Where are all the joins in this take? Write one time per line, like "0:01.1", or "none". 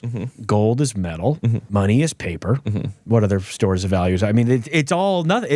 0:01.6